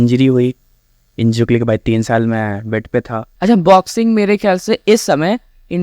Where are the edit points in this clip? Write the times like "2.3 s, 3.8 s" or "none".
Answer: 3.2 s